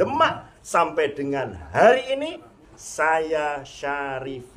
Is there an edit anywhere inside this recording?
yes; 1 cut; at 2.6 s

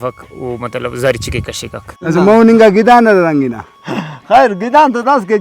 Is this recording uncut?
no; 1 cut; at 2.0 s

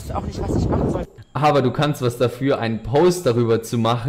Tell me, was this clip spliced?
yes; 1 cut; at 1.2 s

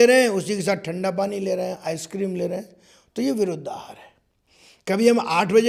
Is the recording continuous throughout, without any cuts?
yes; 0 cuts

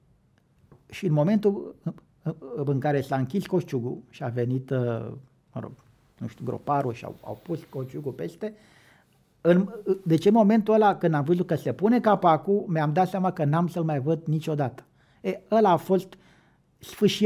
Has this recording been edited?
no; 0 cuts

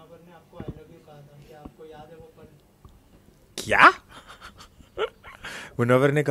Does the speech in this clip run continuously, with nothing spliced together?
yes; 0 cuts

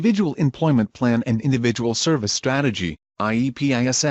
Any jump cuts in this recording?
no; 0 cuts

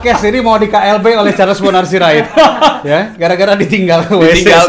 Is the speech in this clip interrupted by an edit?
no; 0 cuts

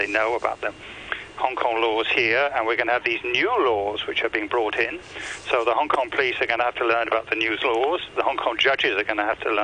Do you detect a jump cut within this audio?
no; 0 cuts

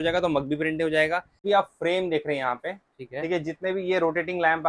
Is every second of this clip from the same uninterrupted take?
no; 1 cut; at 1.3 s

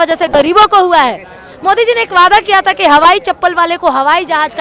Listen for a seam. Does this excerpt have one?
no; 0 cuts

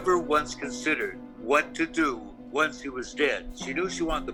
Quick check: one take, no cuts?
yes; 0 cuts

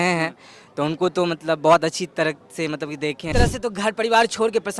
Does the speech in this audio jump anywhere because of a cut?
yes; 1 cut; at 3.3 s

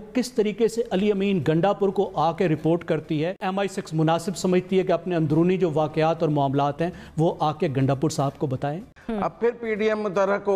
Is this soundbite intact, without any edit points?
no; 2 cuts; at 3.5 s, 8.9 s

